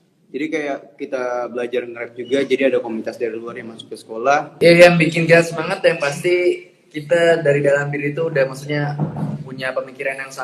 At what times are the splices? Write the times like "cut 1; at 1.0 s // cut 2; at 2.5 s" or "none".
cut 1; at 4.5 s